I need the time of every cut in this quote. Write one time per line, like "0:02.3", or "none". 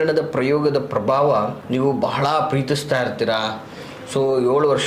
0:01.6